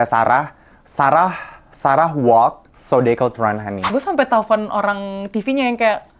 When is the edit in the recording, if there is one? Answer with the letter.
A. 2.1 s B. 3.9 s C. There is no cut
B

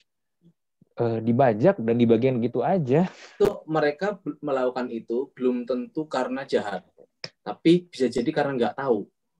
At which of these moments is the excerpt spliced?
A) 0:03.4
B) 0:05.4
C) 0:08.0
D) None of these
A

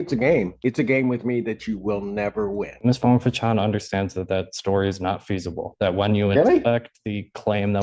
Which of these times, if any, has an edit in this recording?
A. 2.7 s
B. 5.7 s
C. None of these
A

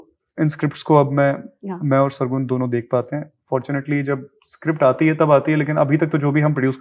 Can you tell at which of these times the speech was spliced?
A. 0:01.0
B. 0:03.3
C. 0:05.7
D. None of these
D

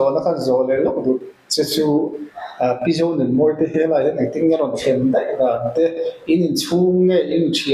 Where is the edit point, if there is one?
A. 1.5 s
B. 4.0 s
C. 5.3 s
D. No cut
D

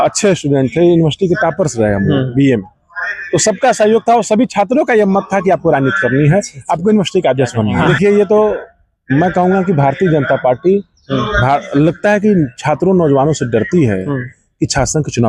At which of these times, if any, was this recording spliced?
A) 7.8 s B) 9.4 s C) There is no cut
A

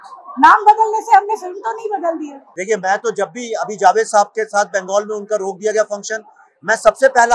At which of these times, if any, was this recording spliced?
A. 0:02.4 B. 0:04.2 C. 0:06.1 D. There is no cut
A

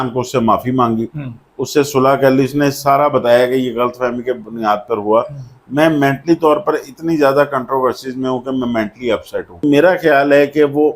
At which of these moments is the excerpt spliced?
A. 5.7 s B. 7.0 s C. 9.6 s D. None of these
C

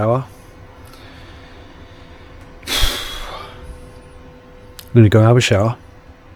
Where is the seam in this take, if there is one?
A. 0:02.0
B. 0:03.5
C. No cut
C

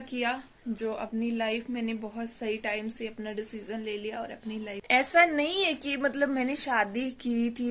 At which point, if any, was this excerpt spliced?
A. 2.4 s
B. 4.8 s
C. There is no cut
B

